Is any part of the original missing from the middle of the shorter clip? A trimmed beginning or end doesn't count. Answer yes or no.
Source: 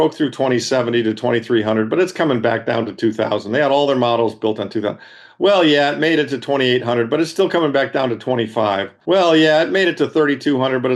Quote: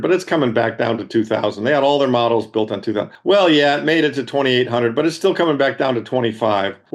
yes